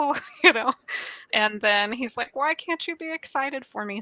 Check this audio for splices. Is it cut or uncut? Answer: cut